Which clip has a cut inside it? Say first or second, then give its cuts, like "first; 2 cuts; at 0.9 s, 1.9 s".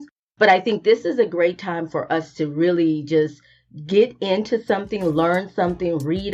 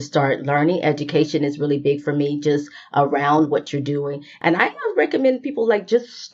second; 1 cut; at 4.3 s